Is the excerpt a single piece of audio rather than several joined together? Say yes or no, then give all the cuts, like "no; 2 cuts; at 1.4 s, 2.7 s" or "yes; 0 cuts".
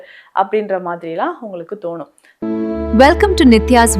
no; 1 cut; at 2.2 s